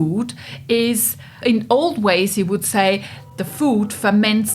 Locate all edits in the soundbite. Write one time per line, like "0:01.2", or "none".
0:01.4
0:03.2